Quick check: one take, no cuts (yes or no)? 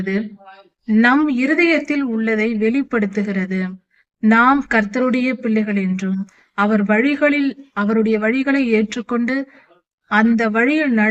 yes